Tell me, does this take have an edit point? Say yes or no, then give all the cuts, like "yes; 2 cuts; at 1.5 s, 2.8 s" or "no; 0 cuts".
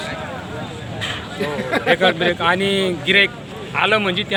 no; 0 cuts